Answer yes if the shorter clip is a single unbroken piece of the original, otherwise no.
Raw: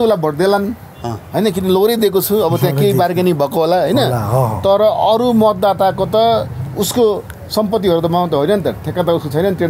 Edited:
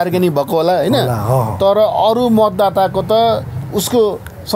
yes